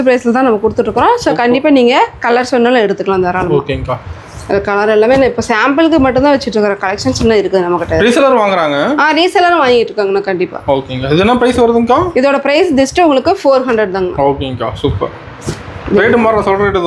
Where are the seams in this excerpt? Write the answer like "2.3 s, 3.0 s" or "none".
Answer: none